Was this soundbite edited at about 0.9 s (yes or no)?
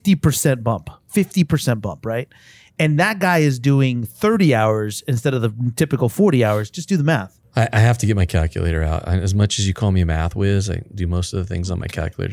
yes